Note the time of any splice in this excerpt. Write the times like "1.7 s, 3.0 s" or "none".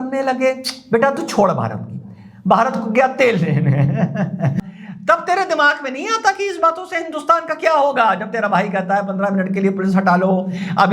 4.5 s